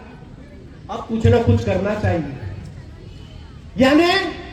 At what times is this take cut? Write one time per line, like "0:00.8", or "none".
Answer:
none